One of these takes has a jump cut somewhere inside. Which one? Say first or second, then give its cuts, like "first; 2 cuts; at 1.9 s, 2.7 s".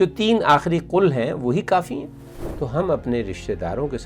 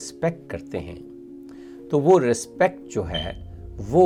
first; 1 cut; at 2.4 s